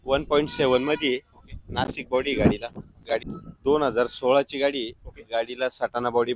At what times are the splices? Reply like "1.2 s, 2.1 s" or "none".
3.3 s